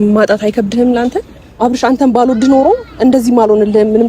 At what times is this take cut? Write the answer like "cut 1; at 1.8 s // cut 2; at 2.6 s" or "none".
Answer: cut 1; at 1.5 s